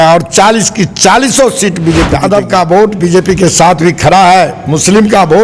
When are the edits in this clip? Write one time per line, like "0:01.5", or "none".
0:02.1